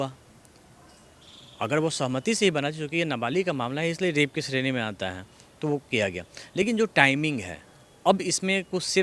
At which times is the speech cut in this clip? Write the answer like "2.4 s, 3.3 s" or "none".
none